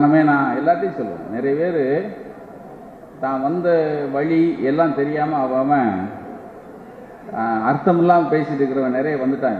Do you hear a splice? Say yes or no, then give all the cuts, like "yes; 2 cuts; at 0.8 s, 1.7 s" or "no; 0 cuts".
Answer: no; 0 cuts